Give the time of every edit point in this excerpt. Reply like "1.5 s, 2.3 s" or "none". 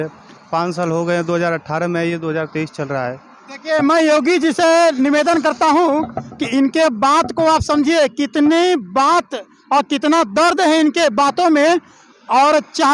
none